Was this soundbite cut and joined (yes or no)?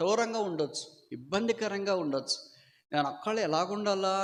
no